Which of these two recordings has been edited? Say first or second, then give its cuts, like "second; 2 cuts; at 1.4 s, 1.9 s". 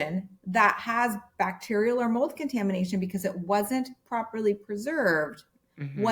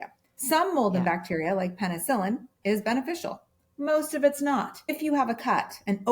second; 1 cut; at 4.9 s